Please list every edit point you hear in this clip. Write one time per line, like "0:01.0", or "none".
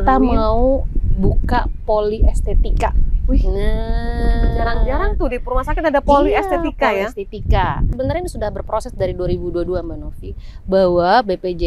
0:07.9